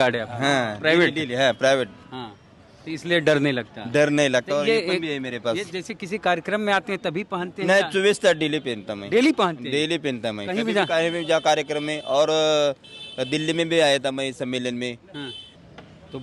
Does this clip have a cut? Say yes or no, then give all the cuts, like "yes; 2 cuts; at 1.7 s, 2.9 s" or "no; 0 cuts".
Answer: no; 0 cuts